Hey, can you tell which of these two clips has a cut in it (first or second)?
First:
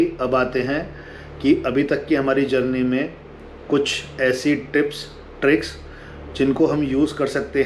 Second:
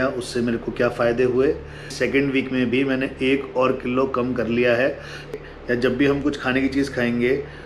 second